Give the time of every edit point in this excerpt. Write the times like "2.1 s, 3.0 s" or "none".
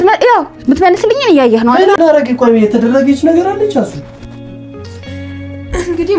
2.0 s